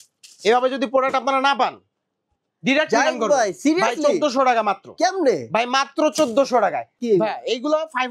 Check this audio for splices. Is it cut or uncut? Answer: cut